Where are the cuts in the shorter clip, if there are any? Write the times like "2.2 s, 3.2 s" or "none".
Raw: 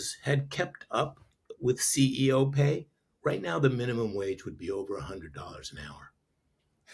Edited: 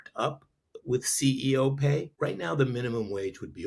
2.1 s